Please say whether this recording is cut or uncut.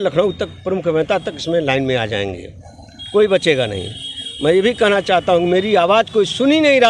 uncut